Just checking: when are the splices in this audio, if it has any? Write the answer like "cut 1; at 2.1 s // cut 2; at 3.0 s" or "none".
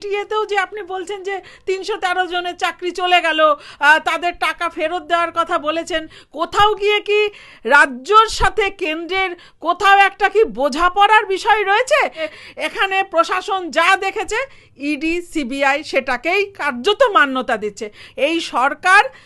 cut 1; at 6.2 s // cut 2; at 12.3 s // cut 3; at 18.0 s